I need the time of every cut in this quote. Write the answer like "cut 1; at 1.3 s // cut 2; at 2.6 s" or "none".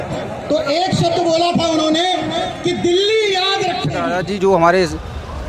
cut 1; at 4.1 s